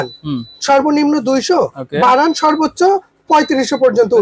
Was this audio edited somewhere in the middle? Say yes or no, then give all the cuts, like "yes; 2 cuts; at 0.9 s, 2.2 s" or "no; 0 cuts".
no; 0 cuts